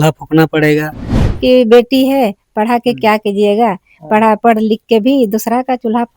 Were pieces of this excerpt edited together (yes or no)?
yes